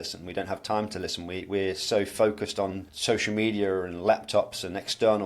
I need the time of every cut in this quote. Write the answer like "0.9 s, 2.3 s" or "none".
2.9 s